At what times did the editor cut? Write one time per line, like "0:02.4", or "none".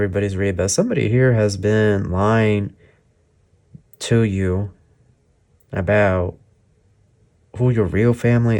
none